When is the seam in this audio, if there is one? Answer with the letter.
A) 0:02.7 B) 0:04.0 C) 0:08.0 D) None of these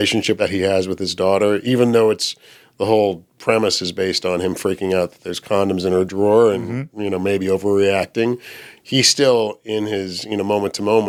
D